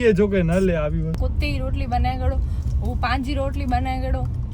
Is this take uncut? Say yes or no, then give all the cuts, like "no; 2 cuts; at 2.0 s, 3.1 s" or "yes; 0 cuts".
no; 1 cut; at 1.2 s